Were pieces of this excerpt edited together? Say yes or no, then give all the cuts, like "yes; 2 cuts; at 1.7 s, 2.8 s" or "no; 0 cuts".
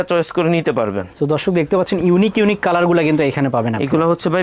no; 0 cuts